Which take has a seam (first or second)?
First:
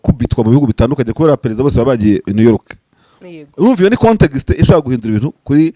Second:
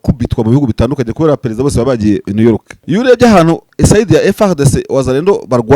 second